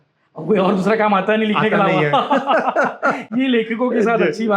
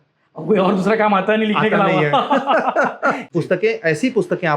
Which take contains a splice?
second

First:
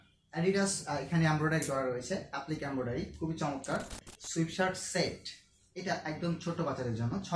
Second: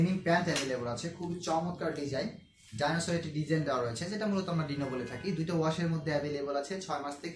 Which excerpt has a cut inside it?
first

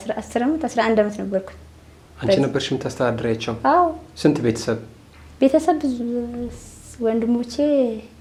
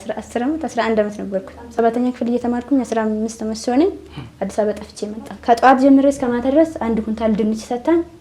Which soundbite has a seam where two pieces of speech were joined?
second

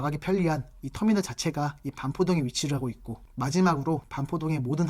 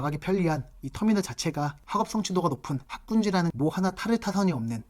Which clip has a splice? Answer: second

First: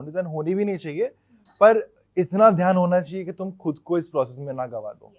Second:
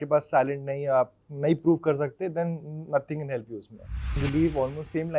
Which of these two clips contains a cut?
second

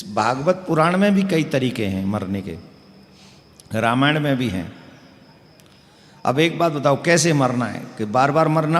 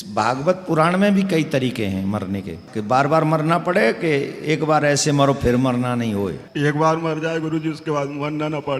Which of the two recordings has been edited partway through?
second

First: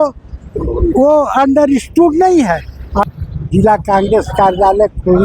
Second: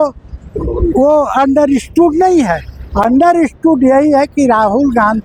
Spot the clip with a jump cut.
first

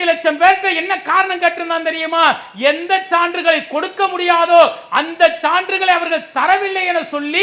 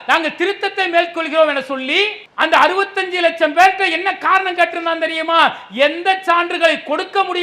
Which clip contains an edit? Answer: second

